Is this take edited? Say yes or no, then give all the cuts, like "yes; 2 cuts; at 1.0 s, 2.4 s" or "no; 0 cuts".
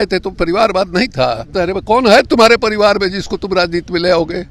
yes; 1 cut; at 1.4 s